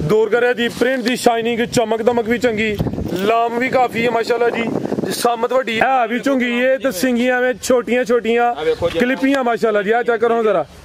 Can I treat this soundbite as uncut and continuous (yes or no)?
no